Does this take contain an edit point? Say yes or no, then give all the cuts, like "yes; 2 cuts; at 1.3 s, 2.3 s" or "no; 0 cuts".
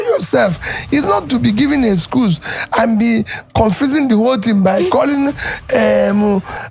no; 0 cuts